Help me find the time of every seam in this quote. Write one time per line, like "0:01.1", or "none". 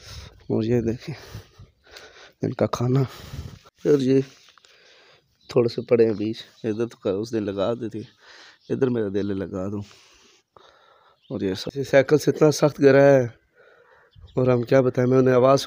0:03.7
0:11.6